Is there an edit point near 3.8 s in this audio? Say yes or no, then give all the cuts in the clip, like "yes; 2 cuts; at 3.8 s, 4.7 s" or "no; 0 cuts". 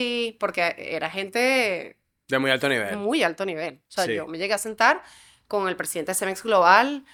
no; 0 cuts